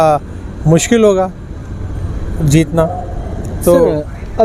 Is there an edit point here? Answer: no; 0 cuts

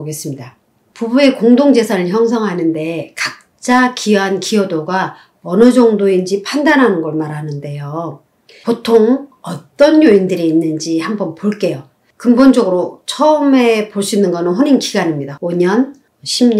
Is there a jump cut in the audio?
yes; 1 cut; at 15.3 s

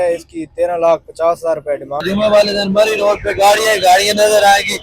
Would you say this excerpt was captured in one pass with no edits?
no; 1 cut; at 2.0 s

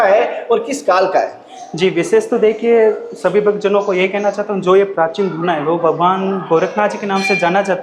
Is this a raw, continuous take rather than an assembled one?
yes; 0 cuts

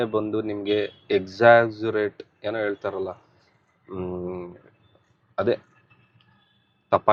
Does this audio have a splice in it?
no; 0 cuts

